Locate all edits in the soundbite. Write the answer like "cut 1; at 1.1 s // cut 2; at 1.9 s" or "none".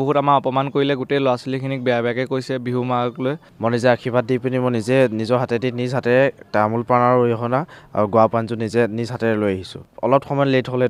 cut 1; at 3.5 s // cut 2; at 9.9 s